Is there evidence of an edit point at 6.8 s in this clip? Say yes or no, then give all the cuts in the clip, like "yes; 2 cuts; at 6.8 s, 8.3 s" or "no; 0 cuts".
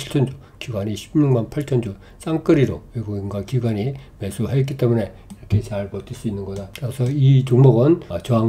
yes; 1 cut; at 6.8 s